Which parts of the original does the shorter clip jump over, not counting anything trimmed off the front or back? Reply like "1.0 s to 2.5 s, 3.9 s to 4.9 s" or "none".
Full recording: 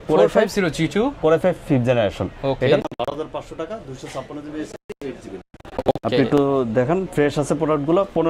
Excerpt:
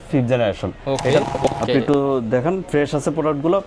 2.9 s to 5.7 s